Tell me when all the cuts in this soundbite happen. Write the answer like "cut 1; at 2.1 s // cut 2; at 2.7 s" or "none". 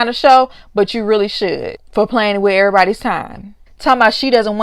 cut 1; at 3.6 s